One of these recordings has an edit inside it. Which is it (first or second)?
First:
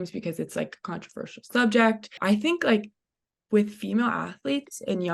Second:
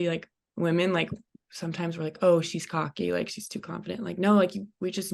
first